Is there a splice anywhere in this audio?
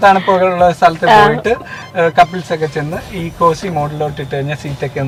no; 0 cuts

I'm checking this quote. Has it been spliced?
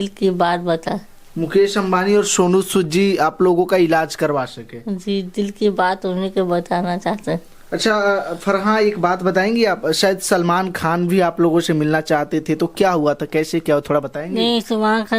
no; 0 cuts

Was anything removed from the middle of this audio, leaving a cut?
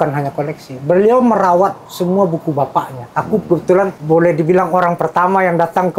yes; 3 cuts; at 1.8 s, 3.0 s, 4.0 s

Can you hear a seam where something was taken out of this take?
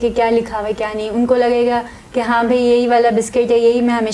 no; 0 cuts

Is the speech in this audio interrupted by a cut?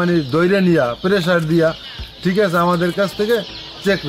no; 0 cuts

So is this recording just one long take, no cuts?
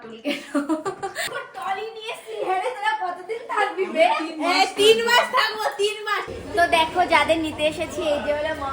no; 2 cuts; at 1.3 s, 6.3 s

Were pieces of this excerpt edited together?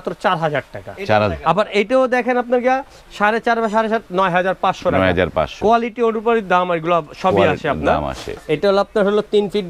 yes; 1 cut; at 8.3 s

